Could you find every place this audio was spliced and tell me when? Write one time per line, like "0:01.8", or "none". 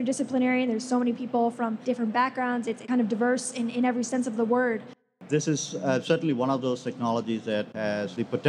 0:05.1